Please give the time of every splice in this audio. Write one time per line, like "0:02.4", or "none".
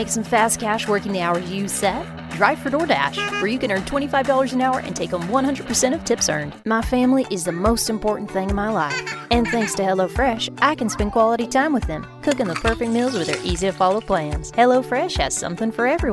0:06.5

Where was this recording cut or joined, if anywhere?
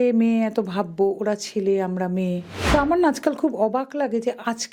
0:02.5

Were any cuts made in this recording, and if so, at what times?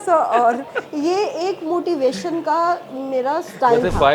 none

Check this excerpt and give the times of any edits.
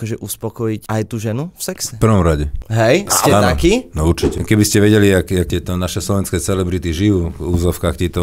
0:00.8
0:01.9
0:02.6
0:04.4
0:05.5

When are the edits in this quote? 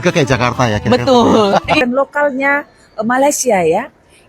0:01.8

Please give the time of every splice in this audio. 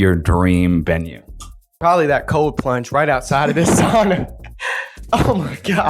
0:01.8

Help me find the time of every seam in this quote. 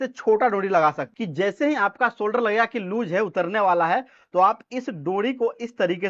0:01.1

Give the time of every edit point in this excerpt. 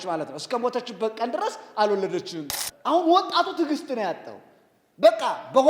0:02.5

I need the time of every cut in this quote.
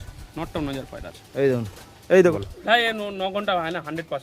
0:02.3

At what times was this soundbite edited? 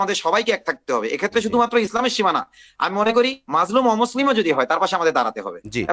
none

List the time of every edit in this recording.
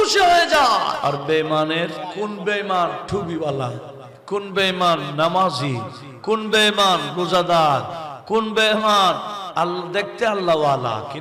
0:01.0
0:02.0

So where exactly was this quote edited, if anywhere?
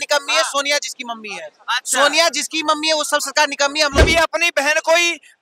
0:03.9

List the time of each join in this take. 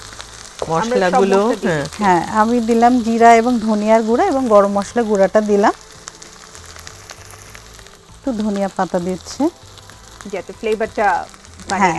none

